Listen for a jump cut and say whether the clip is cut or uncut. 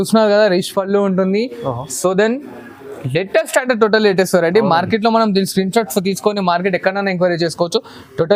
uncut